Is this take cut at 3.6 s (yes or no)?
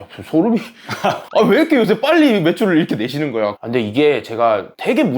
yes